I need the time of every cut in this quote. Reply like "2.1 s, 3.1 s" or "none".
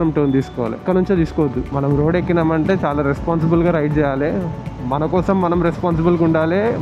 1.7 s